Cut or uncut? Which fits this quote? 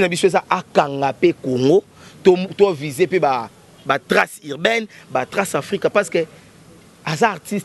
uncut